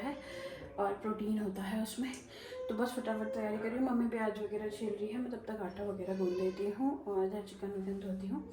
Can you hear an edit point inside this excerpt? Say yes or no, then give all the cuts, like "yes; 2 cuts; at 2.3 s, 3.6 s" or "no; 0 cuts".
no; 0 cuts